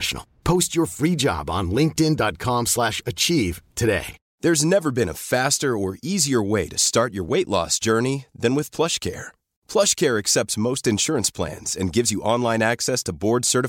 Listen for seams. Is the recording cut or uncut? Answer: cut